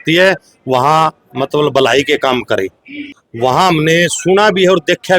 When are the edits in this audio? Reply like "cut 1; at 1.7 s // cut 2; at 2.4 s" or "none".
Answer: cut 1; at 3.1 s